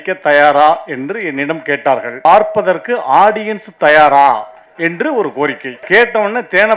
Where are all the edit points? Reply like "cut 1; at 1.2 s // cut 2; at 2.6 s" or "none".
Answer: cut 1; at 2.2 s // cut 2; at 5.8 s